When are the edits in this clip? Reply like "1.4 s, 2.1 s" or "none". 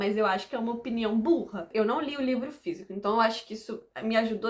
1.7 s

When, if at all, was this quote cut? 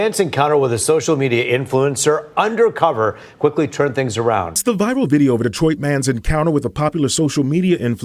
4.6 s

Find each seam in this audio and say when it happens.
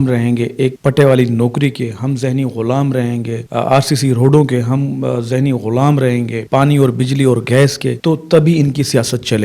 3.4 s, 6.4 s, 7.9 s

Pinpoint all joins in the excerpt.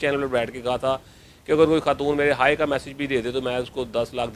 none

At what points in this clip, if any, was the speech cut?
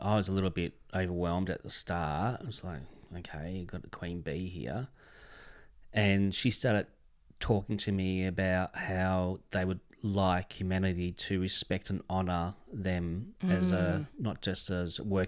none

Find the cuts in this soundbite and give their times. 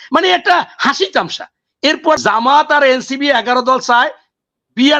2.2 s

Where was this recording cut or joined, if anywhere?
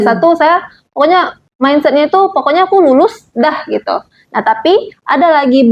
1.4 s

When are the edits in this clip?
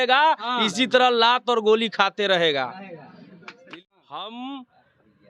3.6 s

